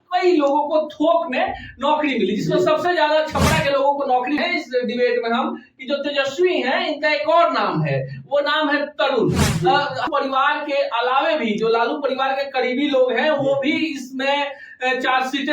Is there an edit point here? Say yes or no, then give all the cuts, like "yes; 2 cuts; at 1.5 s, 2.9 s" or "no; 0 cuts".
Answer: yes; 2 cuts; at 4.4 s, 10.1 s